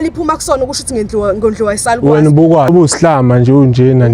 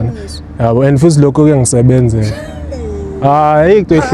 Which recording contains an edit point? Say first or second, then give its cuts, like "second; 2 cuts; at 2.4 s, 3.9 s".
first; 1 cut; at 2.7 s